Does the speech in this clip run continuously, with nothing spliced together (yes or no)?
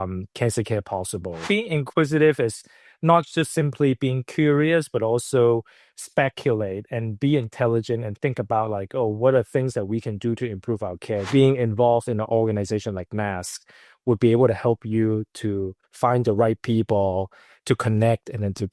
no